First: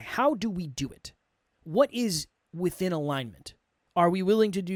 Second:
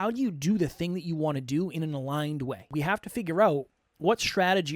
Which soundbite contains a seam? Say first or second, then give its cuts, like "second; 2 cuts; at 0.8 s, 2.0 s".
second; 1 cut; at 2.7 s